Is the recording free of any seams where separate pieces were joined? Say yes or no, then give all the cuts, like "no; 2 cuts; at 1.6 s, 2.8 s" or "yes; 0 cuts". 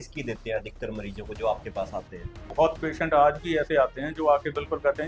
no; 1 cut; at 2.4 s